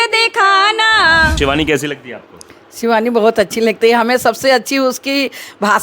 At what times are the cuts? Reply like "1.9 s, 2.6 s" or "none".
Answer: 1.4 s